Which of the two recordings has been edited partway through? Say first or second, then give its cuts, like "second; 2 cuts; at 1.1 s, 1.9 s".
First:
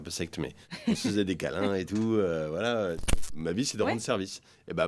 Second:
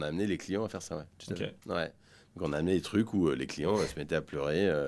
first; 1 cut; at 3.1 s